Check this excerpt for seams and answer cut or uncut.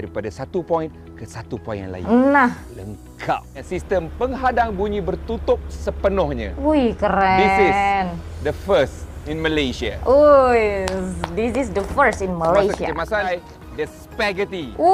cut